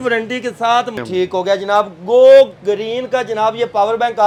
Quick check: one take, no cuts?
yes; 0 cuts

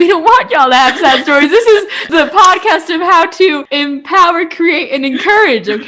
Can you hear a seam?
yes; 2 cuts; at 2.1 s, 3.7 s

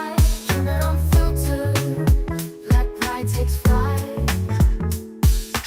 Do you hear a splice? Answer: no; 0 cuts

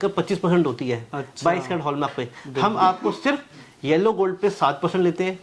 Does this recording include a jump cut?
no; 0 cuts

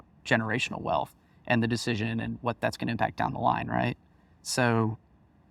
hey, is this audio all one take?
yes; 0 cuts

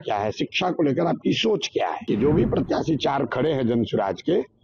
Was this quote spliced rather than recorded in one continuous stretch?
yes; 1 cut; at 2.0 s

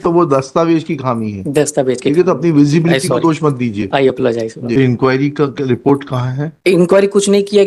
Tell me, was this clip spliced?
yes; 1 cut; at 4.8 s

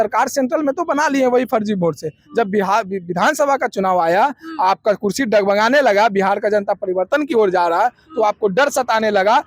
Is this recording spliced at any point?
no; 0 cuts

